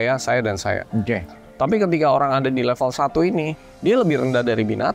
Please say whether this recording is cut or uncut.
cut